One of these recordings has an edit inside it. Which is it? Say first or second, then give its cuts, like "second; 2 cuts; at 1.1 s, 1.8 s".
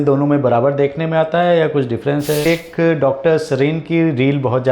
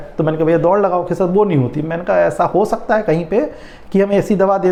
first; 1 cut; at 2.5 s